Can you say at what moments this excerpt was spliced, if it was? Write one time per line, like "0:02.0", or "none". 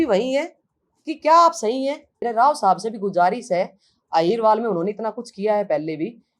0:02.2